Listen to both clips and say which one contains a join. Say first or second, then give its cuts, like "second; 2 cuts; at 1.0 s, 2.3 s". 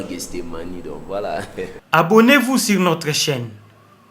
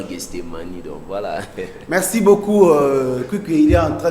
first; 1 cut; at 1.8 s